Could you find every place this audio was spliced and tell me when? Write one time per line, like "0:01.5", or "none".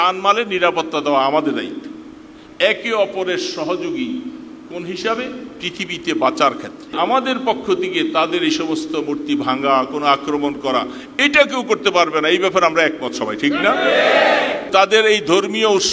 0:06.9
0:14.7